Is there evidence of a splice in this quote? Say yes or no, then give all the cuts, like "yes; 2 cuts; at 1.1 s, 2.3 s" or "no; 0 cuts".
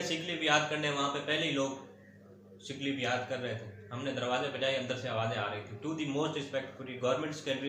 no; 0 cuts